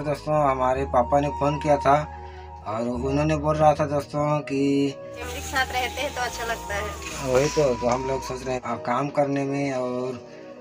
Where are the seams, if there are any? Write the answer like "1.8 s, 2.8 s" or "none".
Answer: 5.2 s, 8.6 s